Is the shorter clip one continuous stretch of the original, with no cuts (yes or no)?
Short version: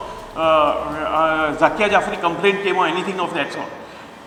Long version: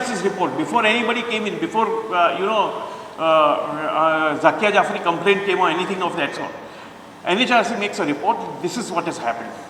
yes